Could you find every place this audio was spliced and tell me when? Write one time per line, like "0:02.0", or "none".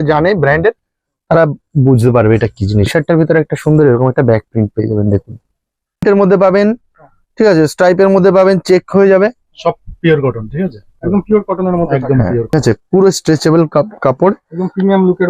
0:02.9
0:06.0
0:12.5